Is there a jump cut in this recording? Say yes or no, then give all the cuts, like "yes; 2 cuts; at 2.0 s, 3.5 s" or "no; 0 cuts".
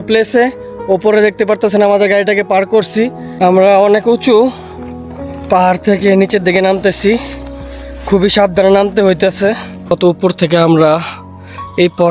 yes; 2 cuts; at 3.2 s, 9.7 s